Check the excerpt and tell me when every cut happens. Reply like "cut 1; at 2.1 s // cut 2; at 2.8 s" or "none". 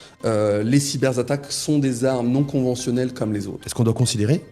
cut 1; at 3.6 s